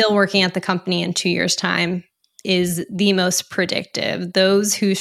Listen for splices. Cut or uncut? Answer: uncut